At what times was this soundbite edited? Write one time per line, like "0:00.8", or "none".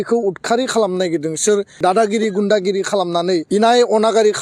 0:01.8
0:03.5

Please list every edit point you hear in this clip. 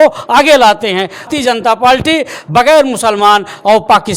0:01.3

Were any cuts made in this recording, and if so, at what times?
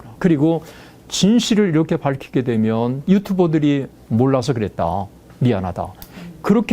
0:03.0

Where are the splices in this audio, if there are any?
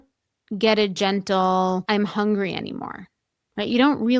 0:01.8

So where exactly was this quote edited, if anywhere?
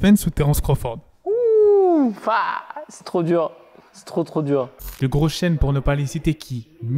0:04.8

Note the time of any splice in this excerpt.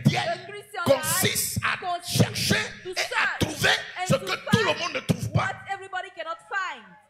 none

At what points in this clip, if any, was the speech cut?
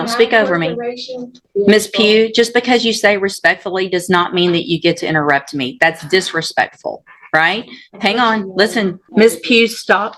0:01.4
0:09.0

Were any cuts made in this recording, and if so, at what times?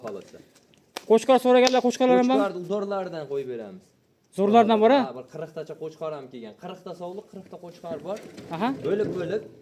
none

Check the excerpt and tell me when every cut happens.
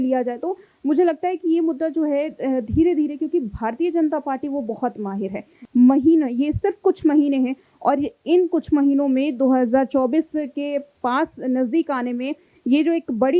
0:05.6

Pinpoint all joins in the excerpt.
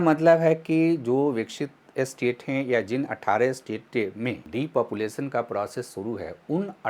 0:04.4

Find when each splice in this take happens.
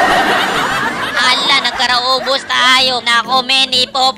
none

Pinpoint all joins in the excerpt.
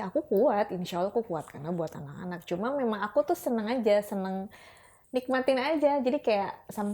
none

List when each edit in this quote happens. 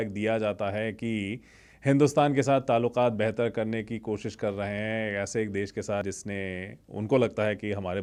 none

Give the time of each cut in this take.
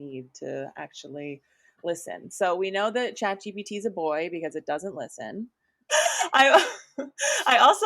0:05.8

